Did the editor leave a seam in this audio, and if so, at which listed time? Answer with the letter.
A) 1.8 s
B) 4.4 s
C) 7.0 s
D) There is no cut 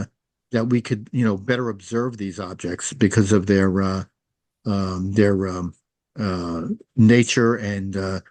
D